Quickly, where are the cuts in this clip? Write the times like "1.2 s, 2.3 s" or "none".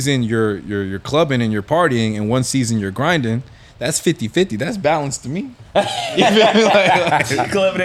none